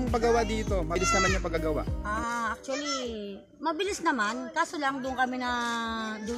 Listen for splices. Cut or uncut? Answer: cut